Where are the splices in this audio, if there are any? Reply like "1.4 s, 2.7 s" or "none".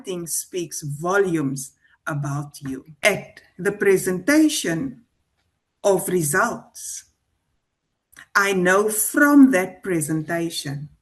3.1 s